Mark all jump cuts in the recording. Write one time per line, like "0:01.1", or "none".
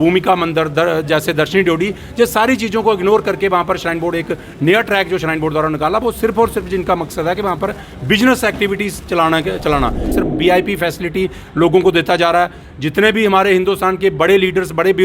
0:10.2